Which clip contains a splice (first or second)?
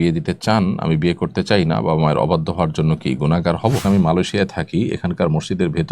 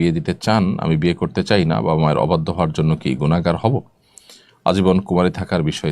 first